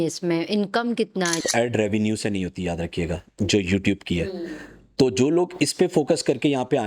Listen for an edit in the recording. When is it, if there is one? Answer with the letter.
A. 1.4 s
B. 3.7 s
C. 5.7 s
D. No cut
A